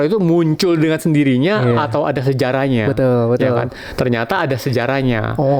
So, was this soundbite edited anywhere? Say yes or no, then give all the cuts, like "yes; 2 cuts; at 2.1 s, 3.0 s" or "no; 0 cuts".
no; 0 cuts